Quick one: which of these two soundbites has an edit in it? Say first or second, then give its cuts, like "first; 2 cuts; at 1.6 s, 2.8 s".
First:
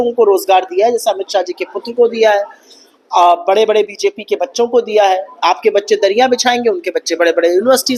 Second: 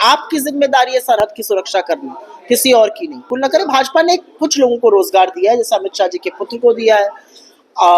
second; 1 cut; at 3.3 s